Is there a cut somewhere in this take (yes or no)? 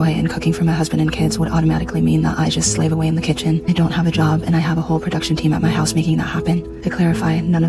no